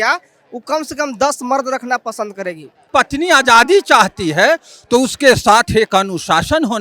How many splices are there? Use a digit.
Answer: 1